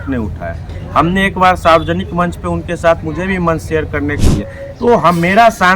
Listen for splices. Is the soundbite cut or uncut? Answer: cut